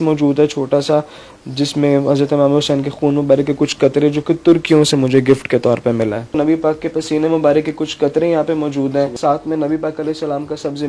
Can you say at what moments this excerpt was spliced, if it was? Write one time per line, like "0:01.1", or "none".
0:06.2
0:09.1